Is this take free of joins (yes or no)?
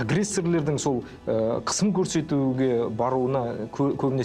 yes